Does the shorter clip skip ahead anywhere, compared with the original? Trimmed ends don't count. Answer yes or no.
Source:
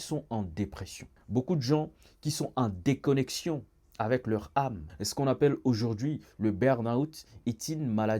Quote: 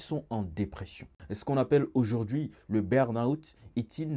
yes